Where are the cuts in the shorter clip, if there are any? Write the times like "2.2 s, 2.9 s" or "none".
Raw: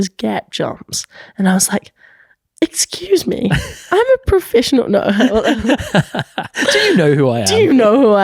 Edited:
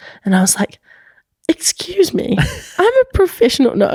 none